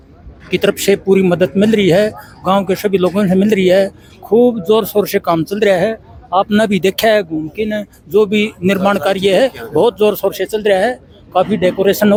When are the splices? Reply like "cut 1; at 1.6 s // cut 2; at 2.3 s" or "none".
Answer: none